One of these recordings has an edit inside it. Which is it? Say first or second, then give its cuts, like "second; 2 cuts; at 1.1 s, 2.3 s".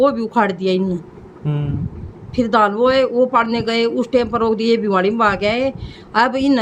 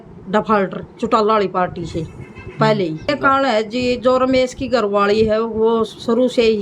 second; 1 cut; at 3.1 s